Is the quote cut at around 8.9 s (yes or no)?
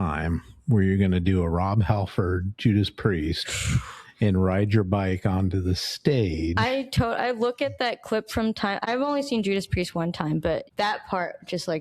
yes